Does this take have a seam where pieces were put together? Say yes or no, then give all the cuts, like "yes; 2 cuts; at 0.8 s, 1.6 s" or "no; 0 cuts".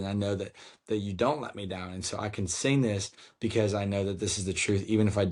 no; 0 cuts